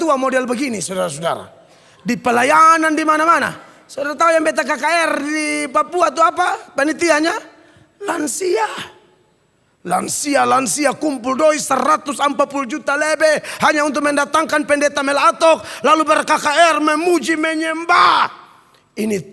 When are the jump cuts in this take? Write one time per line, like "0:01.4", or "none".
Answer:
none